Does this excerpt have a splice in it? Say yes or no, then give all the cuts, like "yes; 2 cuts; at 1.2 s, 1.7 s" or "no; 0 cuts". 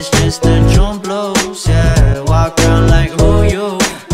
no; 0 cuts